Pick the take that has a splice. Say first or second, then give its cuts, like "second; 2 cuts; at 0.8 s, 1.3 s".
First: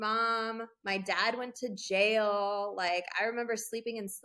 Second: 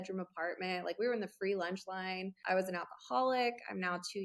second; 1 cut; at 2.4 s